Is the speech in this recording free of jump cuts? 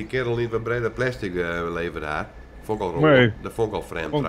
yes; 0 cuts

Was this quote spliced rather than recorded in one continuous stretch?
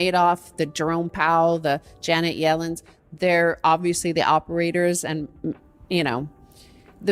no; 0 cuts

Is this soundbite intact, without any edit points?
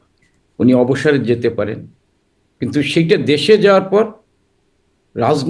yes; 0 cuts

